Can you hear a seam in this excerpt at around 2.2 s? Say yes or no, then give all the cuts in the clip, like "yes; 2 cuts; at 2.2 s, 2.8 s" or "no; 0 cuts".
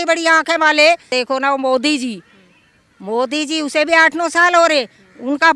no; 0 cuts